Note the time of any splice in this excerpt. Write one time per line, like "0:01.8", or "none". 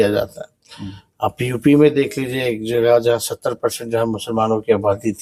none